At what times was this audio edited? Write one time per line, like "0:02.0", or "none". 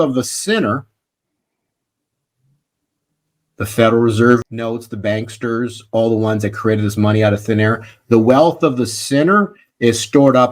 0:04.5